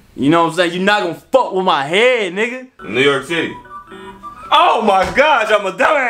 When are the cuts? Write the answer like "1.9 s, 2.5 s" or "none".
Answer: 2.7 s